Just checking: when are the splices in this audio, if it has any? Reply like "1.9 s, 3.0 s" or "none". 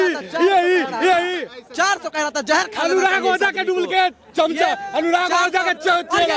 none